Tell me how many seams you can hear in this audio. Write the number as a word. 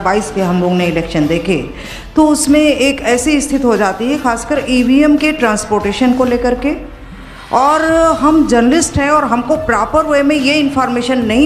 zero